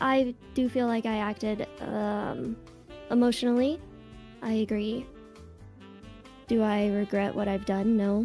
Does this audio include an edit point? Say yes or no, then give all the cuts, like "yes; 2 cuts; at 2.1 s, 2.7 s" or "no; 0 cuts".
no; 0 cuts